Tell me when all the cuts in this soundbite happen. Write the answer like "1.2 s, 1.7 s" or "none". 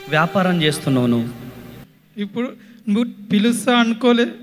2.0 s